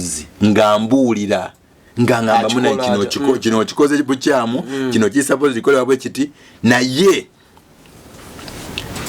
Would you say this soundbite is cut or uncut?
uncut